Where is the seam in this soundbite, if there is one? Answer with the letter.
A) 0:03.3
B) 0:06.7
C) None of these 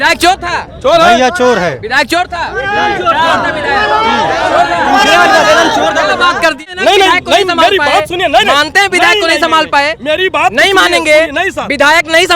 B